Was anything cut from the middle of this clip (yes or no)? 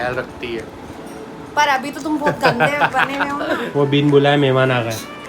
yes